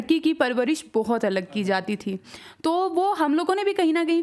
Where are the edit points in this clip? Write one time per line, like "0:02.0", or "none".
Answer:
none

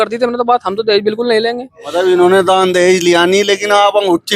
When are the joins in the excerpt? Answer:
0:01.7

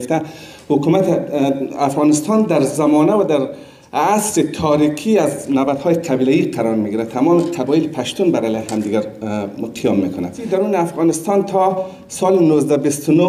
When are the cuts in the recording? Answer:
0:10.4

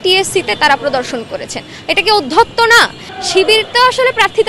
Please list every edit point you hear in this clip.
0:03.1

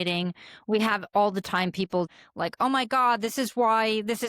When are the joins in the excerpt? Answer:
0:02.1

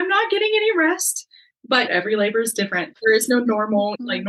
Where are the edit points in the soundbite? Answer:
0:01.7
0:02.9

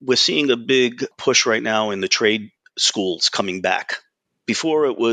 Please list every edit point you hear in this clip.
0:01.1

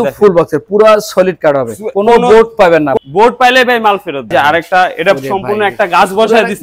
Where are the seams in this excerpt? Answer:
0:02.9
0:04.3

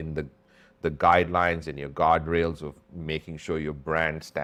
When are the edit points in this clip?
none

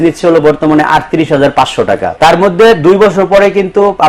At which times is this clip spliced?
0:02.1

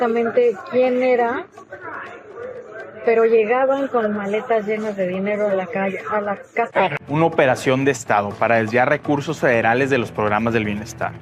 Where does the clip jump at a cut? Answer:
0:06.9

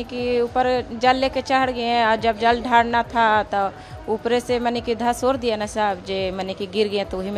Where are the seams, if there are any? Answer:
none

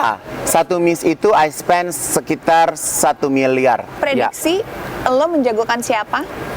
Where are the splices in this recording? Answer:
0:03.9

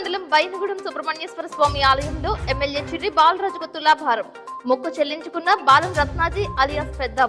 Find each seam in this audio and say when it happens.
none

